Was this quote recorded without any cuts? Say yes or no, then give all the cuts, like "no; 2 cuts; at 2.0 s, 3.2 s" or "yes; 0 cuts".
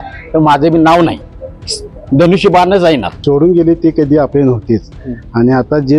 no; 1 cut; at 3.1 s